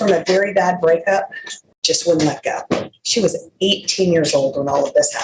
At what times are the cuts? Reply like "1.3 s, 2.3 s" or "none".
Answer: none